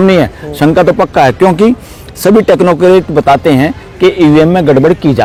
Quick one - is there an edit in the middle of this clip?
no; 0 cuts

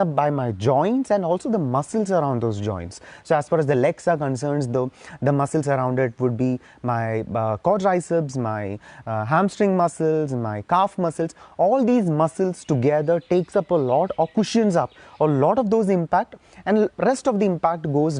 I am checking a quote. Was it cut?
no; 0 cuts

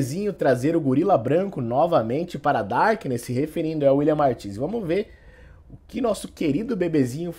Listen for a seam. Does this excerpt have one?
no; 0 cuts

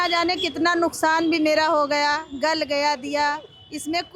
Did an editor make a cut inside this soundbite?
no; 0 cuts

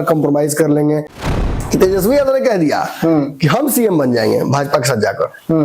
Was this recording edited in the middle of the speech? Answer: yes; 1 cut; at 1.2 s

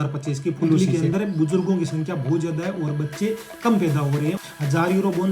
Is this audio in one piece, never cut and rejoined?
no; 2 cuts; at 0.8 s, 4.4 s

